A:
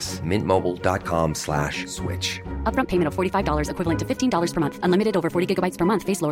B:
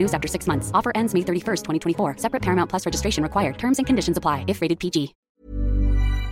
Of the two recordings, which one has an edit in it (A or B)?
B